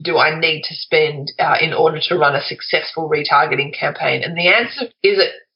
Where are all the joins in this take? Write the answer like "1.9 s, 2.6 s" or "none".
none